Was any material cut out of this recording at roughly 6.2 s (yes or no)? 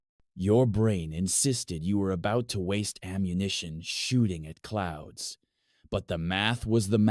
no